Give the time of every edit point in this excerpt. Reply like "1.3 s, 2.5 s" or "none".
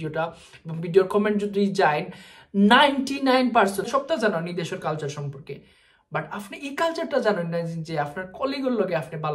3.9 s